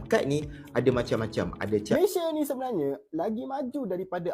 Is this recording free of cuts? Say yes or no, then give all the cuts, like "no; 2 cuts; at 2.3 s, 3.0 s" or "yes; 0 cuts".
no; 1 cut; at 2.0 s